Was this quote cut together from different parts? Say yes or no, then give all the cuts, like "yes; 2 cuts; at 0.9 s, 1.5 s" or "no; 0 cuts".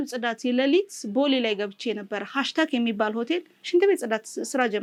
no; 0 cuts